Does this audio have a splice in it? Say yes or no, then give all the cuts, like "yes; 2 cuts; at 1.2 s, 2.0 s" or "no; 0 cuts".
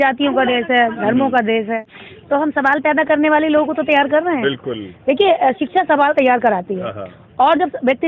yes; 1 cut; at 1.9 s